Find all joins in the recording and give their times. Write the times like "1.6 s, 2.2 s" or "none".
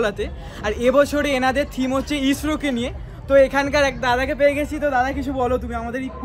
none